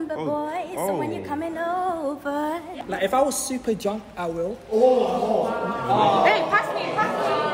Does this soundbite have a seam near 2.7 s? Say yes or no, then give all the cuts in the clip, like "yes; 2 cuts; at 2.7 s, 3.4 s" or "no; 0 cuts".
yes; 1 cut; at 2.7 s